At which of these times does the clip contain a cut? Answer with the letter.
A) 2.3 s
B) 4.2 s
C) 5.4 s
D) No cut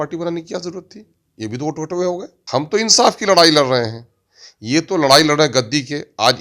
A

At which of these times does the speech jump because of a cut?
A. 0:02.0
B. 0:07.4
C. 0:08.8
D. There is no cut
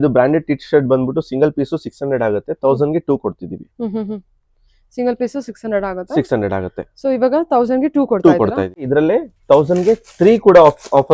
C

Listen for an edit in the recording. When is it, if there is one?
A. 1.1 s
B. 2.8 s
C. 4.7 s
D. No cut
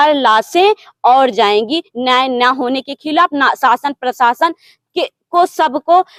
D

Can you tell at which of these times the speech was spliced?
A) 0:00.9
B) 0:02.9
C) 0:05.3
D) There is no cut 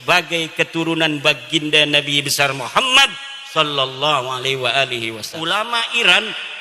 C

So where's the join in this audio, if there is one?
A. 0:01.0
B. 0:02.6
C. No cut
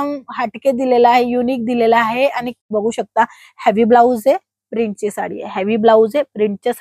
B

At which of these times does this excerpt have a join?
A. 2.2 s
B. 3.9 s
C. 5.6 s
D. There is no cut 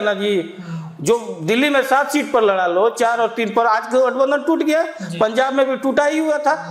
D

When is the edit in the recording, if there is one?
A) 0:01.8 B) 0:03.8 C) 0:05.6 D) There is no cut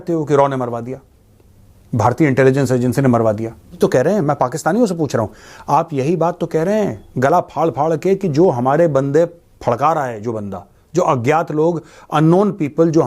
B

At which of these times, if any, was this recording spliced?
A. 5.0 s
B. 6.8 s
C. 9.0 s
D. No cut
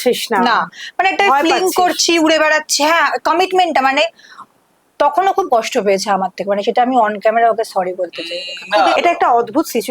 C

